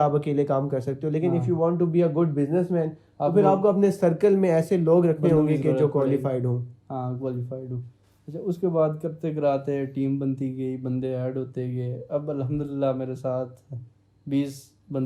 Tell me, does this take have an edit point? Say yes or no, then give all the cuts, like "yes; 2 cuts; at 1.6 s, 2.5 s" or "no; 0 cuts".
no; 0 cuts